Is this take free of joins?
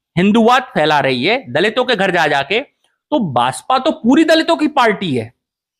yes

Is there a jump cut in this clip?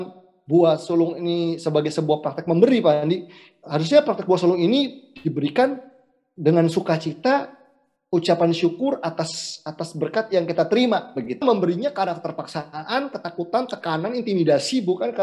yes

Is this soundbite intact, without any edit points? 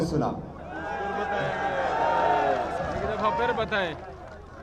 yes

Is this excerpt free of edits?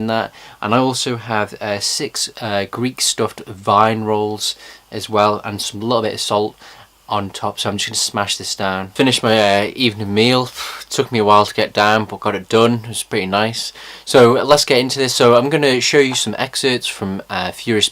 no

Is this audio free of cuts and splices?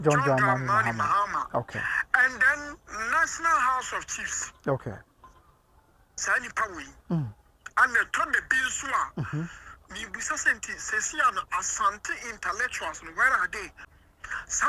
no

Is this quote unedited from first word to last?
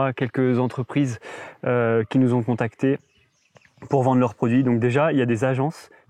yes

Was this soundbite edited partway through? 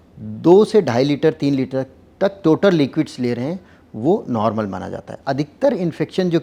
yes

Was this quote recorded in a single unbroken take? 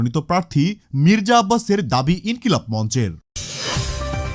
yes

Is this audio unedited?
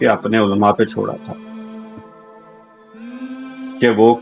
yes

